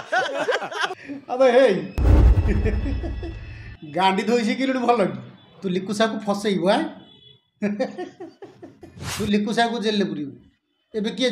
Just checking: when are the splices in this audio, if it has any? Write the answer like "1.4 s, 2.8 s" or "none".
none